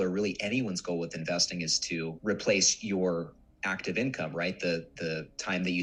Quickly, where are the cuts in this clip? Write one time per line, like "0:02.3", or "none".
none